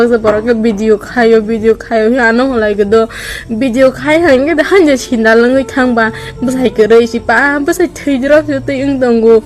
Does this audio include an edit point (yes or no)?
no